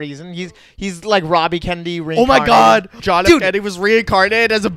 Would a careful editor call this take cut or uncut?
cut